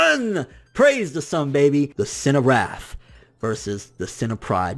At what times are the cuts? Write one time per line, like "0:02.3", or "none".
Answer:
0:01.9